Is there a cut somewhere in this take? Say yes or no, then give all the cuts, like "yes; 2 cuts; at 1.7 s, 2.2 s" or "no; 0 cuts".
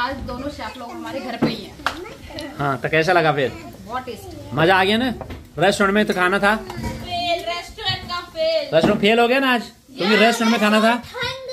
no; 0 cuts